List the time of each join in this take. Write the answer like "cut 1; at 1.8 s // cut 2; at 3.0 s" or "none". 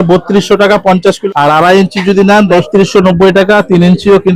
cut 1; at 1.2 s // cut 2; at 2.6 s